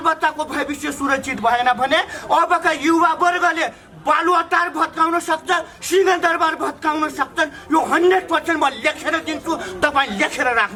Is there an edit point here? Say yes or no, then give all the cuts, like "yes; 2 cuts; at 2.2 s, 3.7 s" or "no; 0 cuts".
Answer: no; 0 cuts